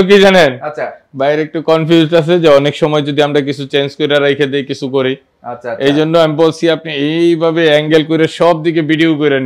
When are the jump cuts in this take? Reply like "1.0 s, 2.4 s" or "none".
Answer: none